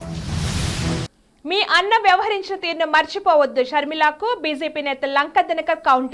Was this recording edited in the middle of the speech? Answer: yes; 1 cut; at 1.1 s

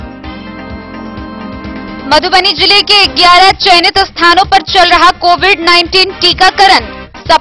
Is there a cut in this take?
yes; 1 cut; at 1.3 s

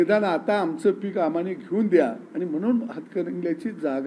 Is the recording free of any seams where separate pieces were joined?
yes; 0 cuts

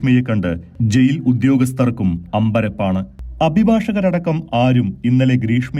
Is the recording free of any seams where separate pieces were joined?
yes; 0 cuts

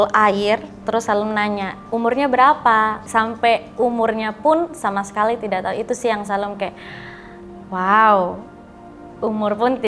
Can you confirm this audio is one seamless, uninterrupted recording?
no; 2 cuts; at 1.8 s, 3.0 s

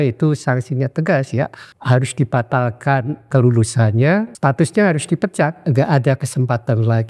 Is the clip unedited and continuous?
no; 4 cuts; at 1.7 s, 3.3 s, 4.3 s, 5.6 s

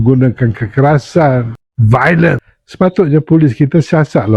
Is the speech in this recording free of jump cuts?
no; 1 cut; at 2.4 s

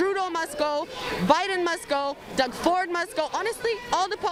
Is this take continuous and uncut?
yes; 0 cuts

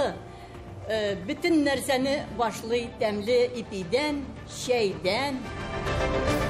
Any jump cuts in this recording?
yes; 1 cut; at 5.4 s

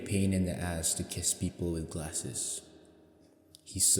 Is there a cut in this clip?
no; 0 cuts

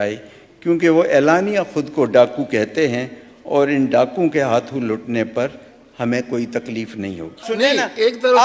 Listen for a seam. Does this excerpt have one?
yes; 1 cut; at 7.5 s

